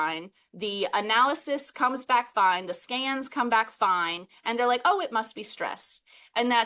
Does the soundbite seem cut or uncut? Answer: uncut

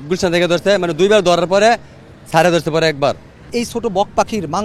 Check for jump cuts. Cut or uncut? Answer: cut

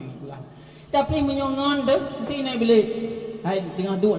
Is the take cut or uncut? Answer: uncut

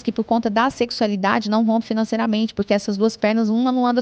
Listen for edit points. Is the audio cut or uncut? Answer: uncut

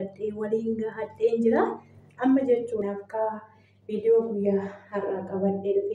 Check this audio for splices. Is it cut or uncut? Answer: cut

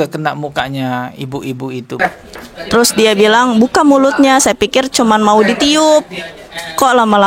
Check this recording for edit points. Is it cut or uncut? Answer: cut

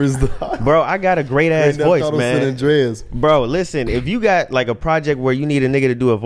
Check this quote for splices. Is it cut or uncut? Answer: uncut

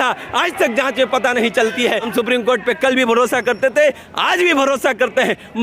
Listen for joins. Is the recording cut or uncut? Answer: cut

